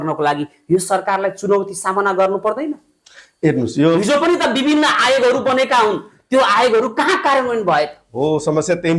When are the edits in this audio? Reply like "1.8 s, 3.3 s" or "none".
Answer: none